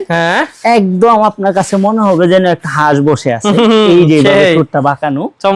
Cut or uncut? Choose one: uncut